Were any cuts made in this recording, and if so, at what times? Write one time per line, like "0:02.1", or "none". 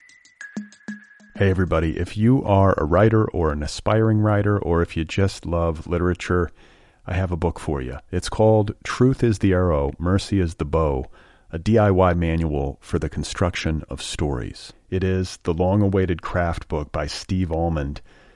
0:00.9